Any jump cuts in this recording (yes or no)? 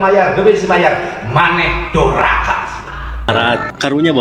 yes